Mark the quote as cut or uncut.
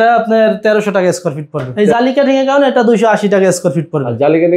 cut